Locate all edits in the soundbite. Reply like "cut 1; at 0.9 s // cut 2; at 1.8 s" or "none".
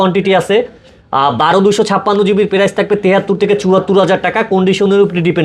none